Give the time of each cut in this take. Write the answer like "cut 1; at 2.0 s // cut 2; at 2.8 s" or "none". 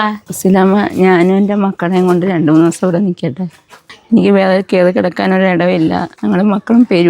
cut 1; at 6.1 s